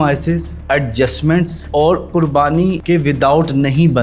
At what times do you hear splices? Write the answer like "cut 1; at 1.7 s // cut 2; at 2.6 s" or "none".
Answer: cut 1; at 2.8 s